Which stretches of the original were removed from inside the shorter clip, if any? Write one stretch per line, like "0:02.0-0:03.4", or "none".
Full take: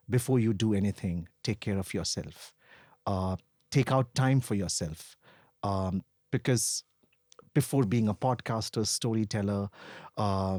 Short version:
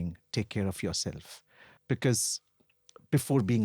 0:02.8-0:06.2